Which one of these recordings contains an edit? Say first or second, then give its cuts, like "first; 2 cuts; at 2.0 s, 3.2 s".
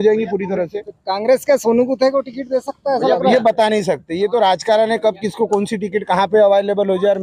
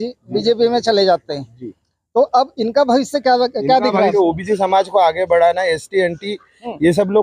second; 1 cut; at 4.1 s